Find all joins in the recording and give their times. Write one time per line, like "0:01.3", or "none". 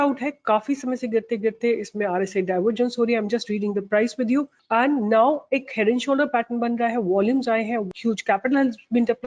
0:04.6
0:07.9